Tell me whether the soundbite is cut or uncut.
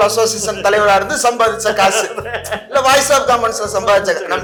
uncut